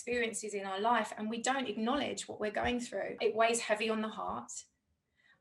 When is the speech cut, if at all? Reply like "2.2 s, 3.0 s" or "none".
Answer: 3.2 s